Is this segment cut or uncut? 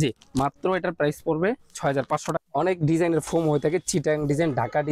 cut